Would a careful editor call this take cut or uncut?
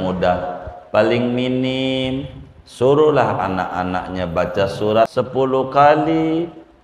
cut